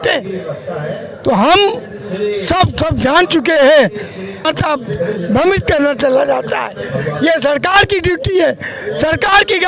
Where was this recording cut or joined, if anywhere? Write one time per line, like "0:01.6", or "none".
0:04.4